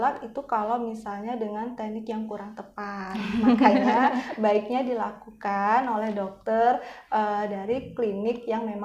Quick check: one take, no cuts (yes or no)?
yes